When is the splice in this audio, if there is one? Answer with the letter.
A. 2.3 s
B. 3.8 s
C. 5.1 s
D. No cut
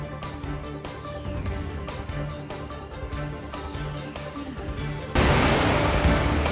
C